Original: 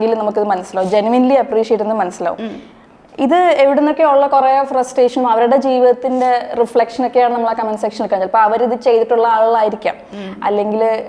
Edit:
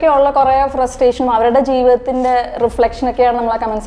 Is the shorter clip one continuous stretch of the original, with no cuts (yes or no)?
yes